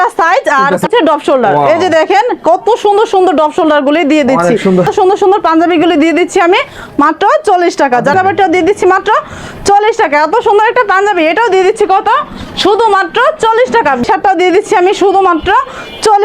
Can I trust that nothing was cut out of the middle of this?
no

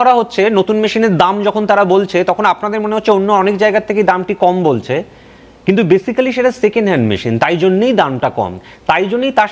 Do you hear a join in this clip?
no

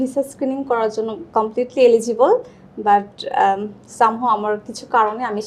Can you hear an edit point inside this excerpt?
no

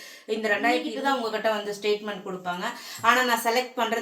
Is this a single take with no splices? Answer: no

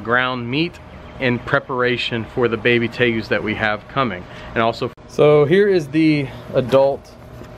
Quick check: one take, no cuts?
yes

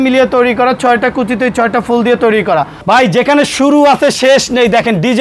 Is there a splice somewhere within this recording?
yes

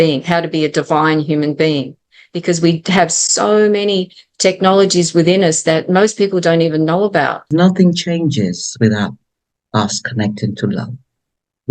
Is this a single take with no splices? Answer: no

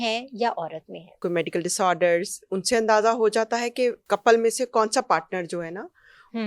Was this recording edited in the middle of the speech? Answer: yes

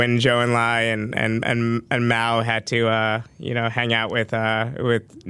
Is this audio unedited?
yes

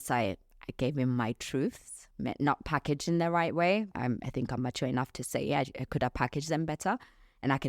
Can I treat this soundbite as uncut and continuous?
no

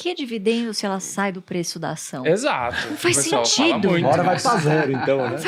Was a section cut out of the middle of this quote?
no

